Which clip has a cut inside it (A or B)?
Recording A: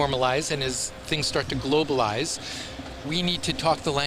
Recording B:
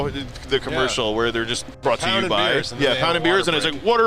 B